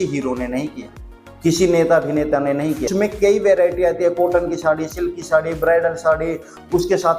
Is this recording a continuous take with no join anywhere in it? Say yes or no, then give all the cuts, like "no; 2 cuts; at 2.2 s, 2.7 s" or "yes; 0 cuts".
no; 1 cut; at 2.9 s